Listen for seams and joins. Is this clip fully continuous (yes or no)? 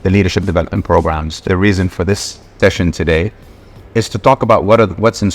no